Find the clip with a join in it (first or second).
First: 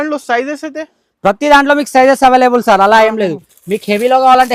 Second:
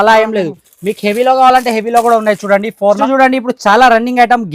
second